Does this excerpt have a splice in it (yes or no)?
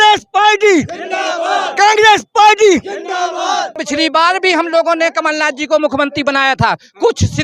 yes